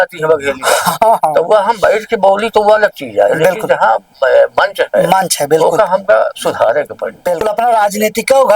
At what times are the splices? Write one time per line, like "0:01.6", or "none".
0:07.4